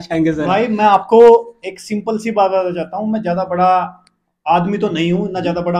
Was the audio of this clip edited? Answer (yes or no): no